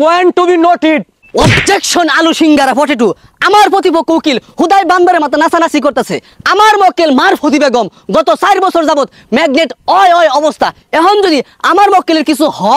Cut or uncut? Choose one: cut